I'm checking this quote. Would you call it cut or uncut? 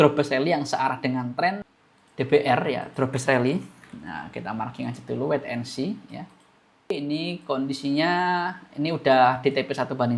cut